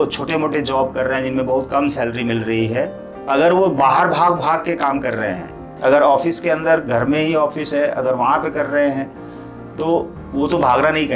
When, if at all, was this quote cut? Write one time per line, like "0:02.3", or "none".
0:03.1
0:05.6